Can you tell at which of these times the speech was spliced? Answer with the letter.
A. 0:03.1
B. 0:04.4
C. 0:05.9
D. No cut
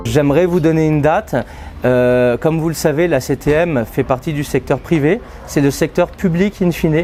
D